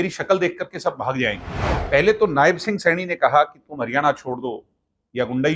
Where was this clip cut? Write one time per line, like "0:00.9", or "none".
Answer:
0:01.7

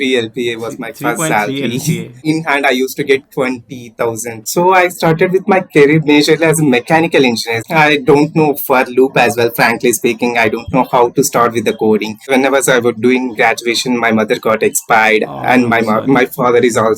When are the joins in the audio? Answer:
0:02.1
0:04.4
0:07.5
0:12.2

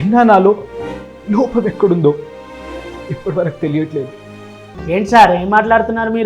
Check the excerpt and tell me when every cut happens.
0:04.7

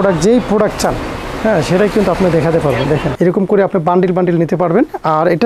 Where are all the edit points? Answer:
0:03.1

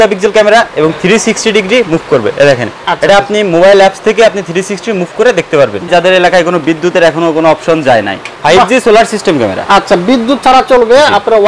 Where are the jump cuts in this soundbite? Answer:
0:05.9
0:08.3

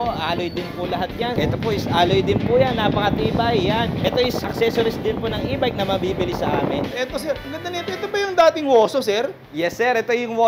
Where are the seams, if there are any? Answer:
0:01.4
0:04.4
0:07.1

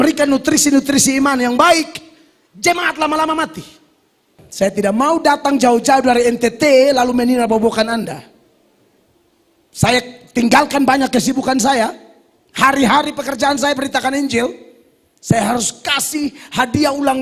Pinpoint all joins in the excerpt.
0:04.4

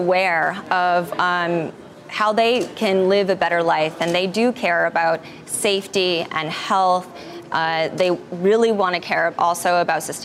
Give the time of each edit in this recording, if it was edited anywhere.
none

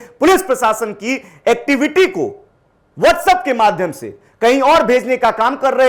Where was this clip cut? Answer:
none

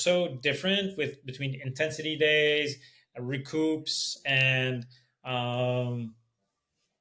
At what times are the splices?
none

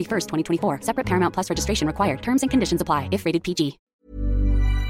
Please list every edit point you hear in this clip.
0:04.0

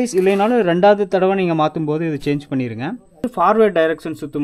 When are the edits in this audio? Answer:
0:03.3

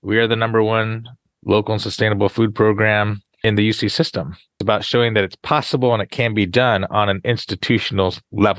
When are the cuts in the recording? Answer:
0:01.2
0:03.4
0:04.6

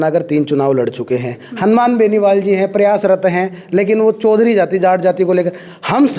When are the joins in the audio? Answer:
none

